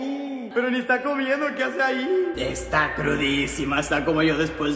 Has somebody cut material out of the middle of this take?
yes; 1 cut; at 2.4 s

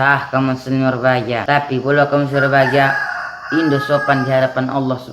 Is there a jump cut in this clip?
yes; 1 cut; at 1.4 s

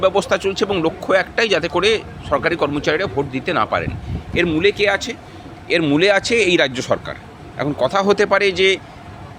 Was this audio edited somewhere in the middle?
no; 0 cuts

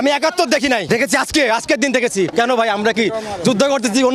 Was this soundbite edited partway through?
yes; 2 cuts; at 0.8 s, 2.3 s

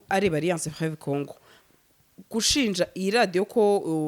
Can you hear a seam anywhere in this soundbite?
yes; 1 cut; at 1.6 s

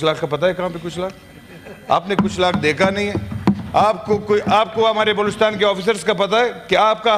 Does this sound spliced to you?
no; 0 cuts

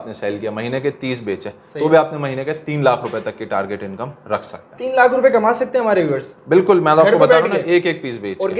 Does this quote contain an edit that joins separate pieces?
no; 0 cuts

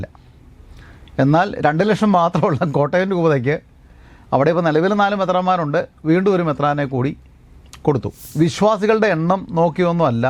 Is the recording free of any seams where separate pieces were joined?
no; 1 cut; at 8.2 s

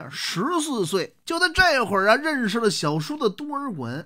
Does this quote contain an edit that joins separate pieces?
yes; 1 cut; at 1.2 s

